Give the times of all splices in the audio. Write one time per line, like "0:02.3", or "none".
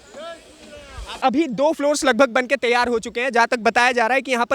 0:01.2

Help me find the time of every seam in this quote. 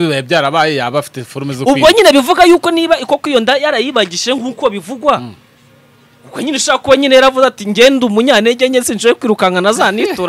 none

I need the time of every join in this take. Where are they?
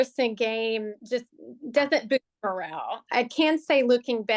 0:02.9

